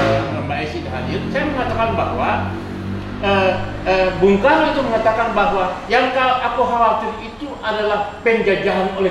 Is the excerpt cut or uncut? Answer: uncut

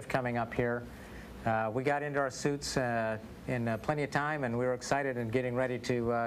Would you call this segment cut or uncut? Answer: cut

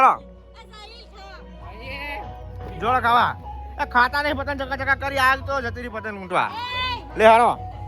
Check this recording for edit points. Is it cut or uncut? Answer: uncut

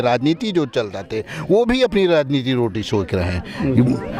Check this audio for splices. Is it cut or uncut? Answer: uncut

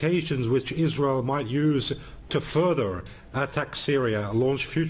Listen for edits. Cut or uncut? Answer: uncut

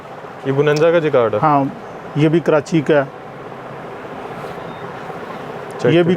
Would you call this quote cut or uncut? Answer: uncut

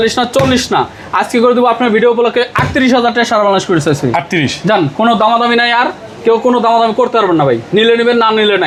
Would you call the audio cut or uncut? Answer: uncut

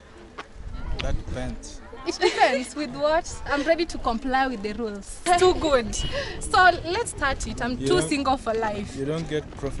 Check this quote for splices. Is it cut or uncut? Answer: cut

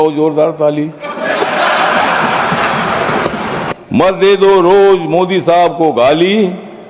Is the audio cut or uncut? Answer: cut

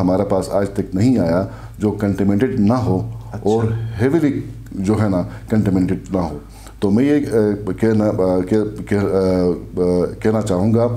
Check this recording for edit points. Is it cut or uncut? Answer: uncut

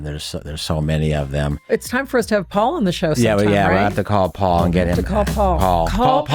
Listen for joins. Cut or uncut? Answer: uncut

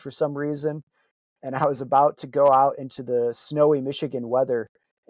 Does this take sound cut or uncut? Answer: uncut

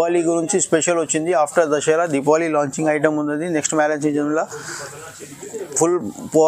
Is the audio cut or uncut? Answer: uncut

